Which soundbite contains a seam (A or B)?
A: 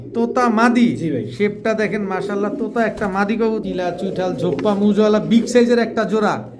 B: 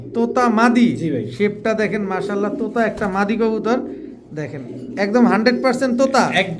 A